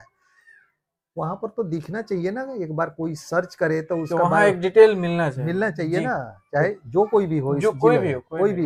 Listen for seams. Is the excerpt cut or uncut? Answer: uncut